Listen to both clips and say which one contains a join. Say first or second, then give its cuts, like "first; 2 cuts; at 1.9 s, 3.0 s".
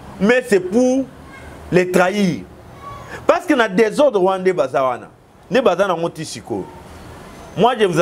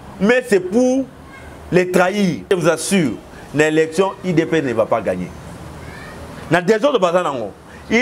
second; 1 cut; at 2.5 s